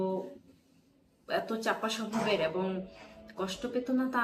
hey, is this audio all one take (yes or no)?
yes